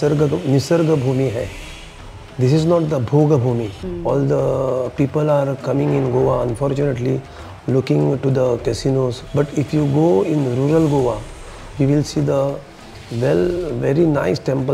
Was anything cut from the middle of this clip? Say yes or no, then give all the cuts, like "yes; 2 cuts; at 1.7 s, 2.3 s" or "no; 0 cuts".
yes; 2 cuts; at 3.8 s, 9.2 s